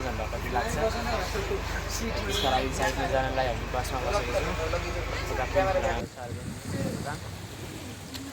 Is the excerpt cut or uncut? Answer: cut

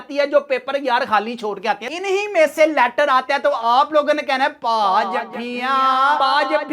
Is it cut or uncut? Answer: cut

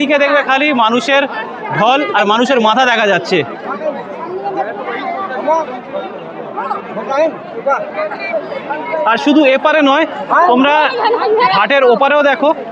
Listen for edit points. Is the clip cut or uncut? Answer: uncut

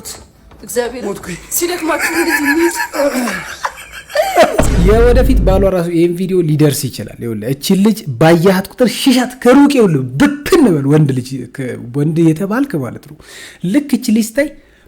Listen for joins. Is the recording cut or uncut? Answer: cut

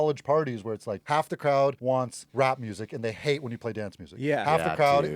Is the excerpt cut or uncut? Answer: cut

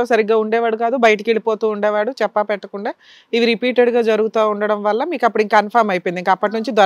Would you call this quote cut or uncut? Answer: uncut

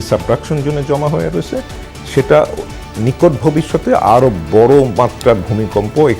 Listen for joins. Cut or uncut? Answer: uncut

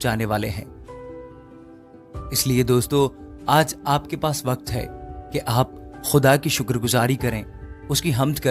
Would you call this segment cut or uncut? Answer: uncut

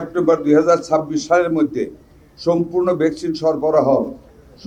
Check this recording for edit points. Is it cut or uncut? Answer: uncut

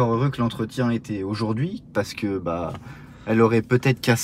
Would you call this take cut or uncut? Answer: uncut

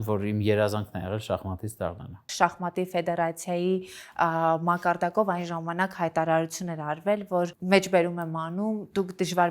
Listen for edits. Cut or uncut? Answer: cut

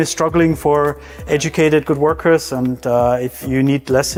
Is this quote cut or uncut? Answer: uncut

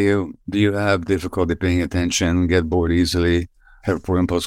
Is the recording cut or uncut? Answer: uncut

